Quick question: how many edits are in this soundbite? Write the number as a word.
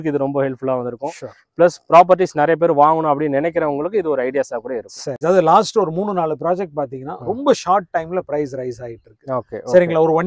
one